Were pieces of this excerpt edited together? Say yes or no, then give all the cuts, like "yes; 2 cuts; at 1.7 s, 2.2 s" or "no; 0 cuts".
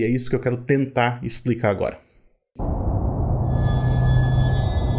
yes; 1 cut; at 2.1 s